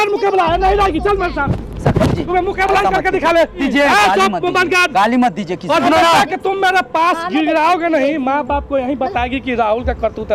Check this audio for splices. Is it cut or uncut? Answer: cut